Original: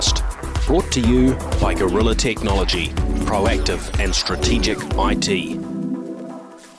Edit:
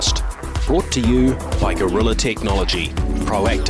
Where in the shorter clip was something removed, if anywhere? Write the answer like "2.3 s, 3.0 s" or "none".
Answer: none